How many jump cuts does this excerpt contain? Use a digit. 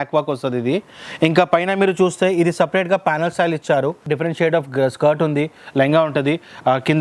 1